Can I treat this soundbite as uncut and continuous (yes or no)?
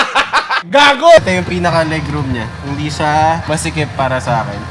no